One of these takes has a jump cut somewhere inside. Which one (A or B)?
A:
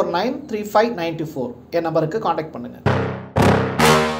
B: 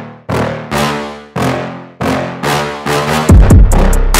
A